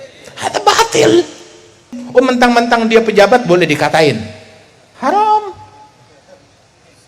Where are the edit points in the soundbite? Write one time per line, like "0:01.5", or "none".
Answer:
0:02.0

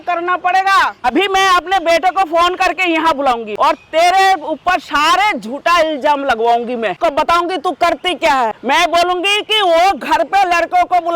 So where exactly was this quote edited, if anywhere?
0:01.0
0:03.5
0:07.0
0:08.6

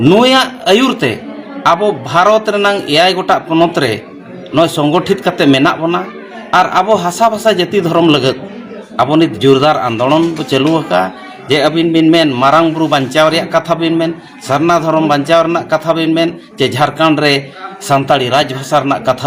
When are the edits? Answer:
none

